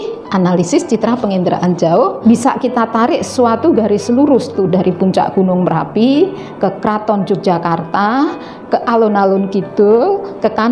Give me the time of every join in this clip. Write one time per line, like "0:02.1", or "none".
0:02.2